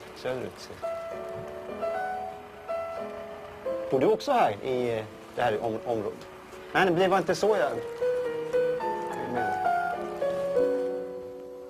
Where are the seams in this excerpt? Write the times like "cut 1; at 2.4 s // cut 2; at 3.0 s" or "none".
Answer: none